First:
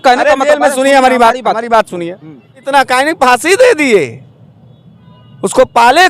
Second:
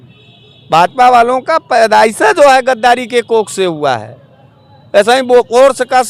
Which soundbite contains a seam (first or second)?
first